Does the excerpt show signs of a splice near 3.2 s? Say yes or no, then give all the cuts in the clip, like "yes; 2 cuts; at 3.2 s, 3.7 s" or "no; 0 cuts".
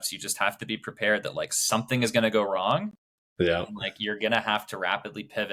no; 0 cuts